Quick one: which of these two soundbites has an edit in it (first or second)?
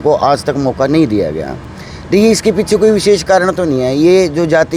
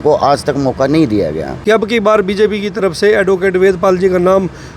second